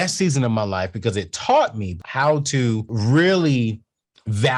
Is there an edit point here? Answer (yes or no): yes